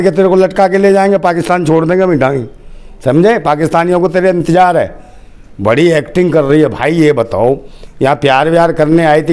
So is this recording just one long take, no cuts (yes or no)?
yes